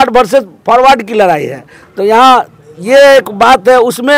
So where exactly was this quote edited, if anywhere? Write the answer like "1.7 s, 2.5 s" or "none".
none